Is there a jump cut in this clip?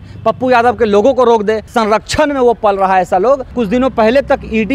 yes; 2 cuts; at 1.6 s, 3.5 s

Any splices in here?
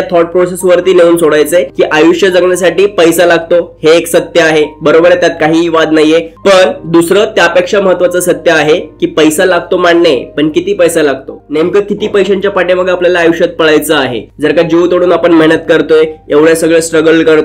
no; 0 cuts

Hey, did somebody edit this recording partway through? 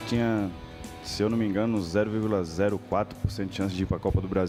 no; 0 cuts

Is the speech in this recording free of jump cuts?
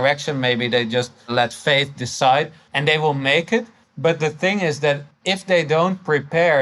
no; 4 cuts; at 1.3 s, 2.6 s, 3.8 s, 5.1 s

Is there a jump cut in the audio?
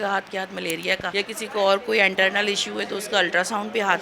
yes; 1 cut; at 1.1 s

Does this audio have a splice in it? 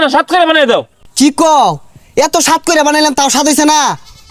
no; 0 cuts

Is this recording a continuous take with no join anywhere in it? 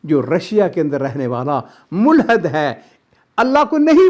yes; 0 cuts

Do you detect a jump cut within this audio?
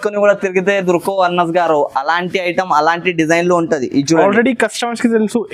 no; 0 cuts

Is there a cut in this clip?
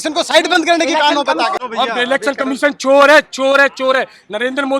yes; 1 cut; at 1.6 s

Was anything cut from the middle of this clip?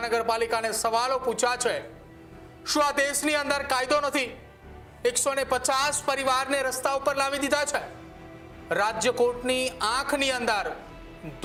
no; 0 cuts

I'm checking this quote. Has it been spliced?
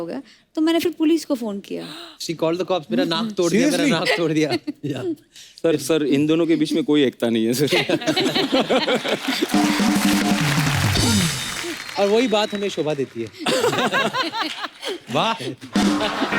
no; 0 cuts

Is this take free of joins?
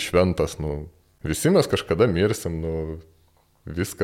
yes; 0 cuts

